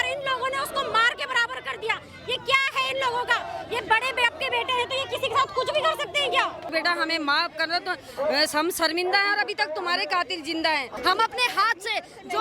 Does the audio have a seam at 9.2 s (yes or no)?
no